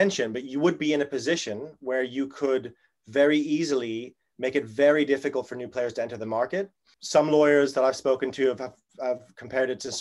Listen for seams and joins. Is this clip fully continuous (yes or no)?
no